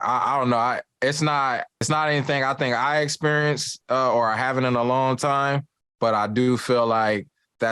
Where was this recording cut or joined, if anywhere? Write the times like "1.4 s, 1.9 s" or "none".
1.9 s